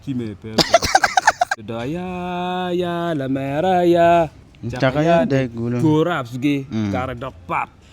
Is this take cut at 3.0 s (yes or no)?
no